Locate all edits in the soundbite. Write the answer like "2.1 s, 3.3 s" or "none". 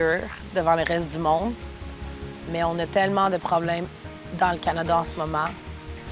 none